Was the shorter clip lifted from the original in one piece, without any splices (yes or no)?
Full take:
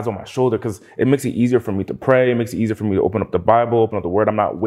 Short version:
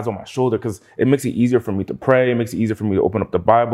yes